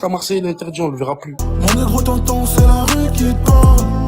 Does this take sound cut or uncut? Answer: cut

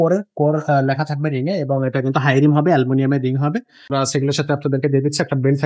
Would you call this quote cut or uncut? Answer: cut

